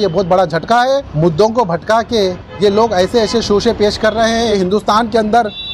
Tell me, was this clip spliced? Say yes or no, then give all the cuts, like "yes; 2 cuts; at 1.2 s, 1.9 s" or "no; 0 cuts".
yes; 2 cuts; at 1.1 s, 4.5 s